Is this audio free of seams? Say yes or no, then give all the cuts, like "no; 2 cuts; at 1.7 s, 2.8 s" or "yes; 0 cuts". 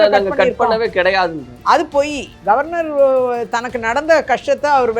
yes; 0 cuts